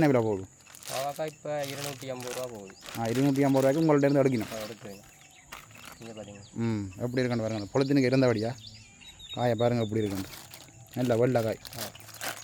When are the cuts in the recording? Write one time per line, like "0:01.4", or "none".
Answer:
none